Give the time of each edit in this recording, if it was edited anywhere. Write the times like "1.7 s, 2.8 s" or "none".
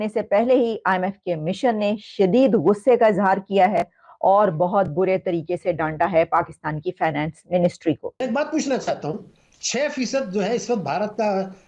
8.2 s